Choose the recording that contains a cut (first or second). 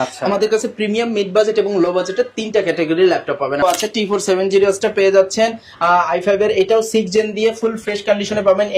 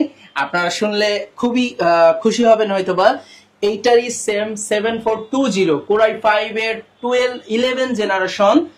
first